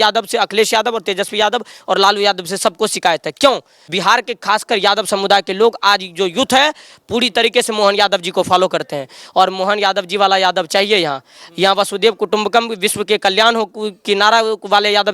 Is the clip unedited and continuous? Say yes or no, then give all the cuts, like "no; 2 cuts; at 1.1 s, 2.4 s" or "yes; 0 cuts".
no; 1 cut; at 3.9 s